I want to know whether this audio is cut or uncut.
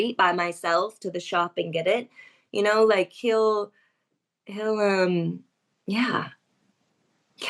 uncut